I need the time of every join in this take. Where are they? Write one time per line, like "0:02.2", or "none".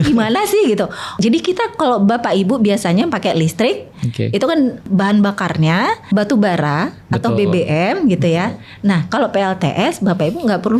0:01.2
0:04.9
0:06.0